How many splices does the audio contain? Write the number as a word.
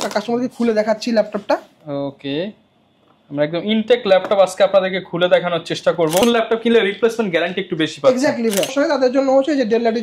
two